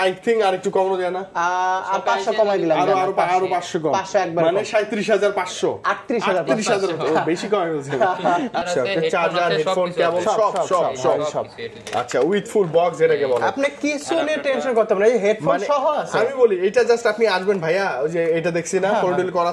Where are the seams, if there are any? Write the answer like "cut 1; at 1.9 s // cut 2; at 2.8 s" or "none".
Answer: cut 1; at 8.6 s